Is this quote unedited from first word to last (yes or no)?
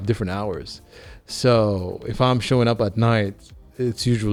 yes